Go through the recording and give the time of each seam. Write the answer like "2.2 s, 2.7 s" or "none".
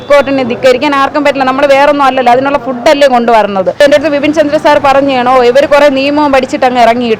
3.8 s